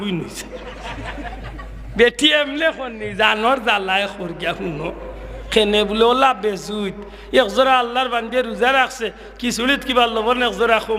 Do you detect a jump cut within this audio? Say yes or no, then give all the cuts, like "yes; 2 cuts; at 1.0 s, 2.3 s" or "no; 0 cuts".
no; 0 cuts